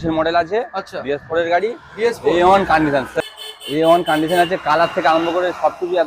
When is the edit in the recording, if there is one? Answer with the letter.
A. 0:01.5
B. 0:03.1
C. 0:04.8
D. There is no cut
B